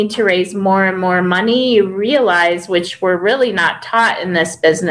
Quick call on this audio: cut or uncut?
uncut